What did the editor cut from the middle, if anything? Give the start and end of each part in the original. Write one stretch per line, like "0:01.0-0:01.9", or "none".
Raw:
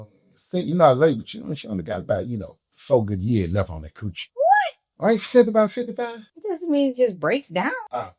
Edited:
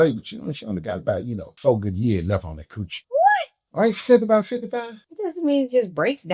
0:02.5-0:02.7